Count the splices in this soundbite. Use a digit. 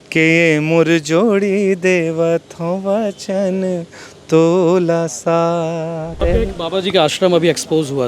1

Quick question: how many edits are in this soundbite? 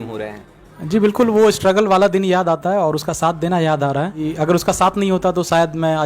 1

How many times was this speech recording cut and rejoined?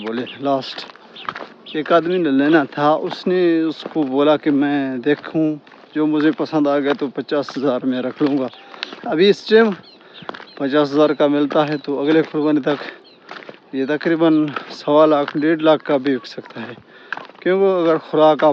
0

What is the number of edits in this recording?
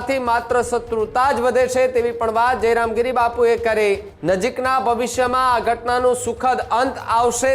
1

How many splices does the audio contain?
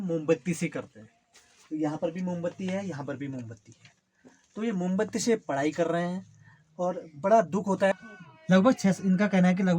1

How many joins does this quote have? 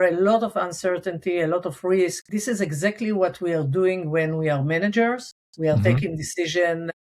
1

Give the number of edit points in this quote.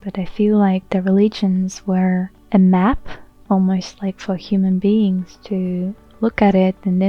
1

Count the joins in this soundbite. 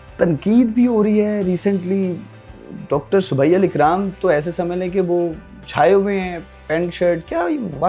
0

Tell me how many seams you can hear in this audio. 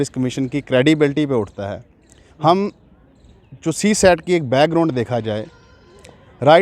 0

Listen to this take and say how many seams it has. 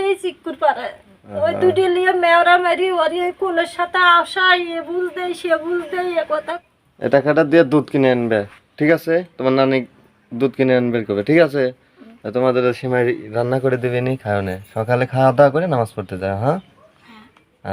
1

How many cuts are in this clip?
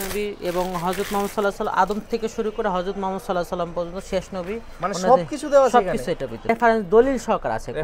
1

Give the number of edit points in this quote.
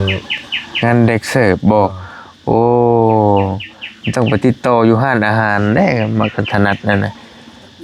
0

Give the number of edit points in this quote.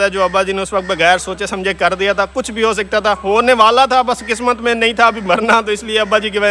0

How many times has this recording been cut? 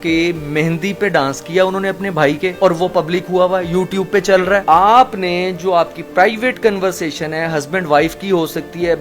1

